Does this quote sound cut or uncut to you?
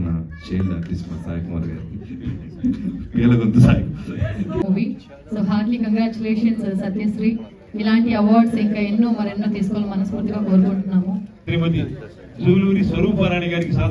cut